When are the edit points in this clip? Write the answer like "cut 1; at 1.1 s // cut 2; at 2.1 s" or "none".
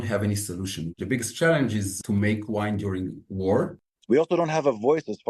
cut 1; at 1.0 s // cut 2; at 1.9 s // cut 3; at 3.8 s